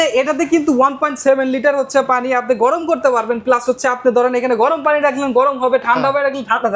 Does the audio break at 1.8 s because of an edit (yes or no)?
no